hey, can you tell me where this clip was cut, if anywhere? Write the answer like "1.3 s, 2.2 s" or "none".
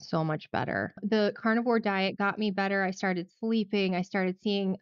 1.0 s